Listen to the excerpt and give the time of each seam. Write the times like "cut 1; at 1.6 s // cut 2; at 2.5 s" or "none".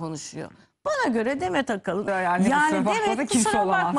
cut 1; at 2.1 s